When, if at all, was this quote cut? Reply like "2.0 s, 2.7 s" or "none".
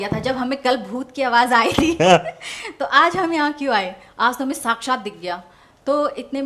none